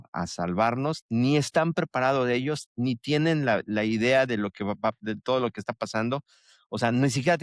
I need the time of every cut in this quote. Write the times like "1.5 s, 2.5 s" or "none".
none